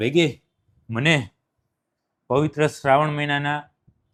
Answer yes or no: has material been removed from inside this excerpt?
no